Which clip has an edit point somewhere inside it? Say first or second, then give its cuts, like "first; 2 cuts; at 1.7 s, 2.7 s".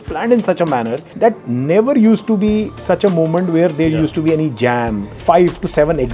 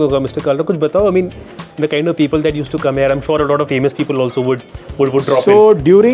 first; 2 cuts; at 1.1 s, 5.1 s